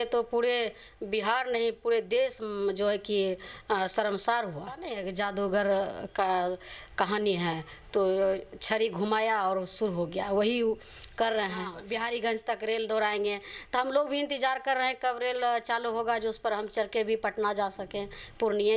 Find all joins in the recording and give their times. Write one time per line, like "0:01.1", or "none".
0:05.0
0:11.8